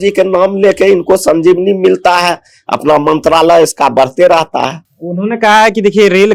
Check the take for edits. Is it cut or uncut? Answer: uncut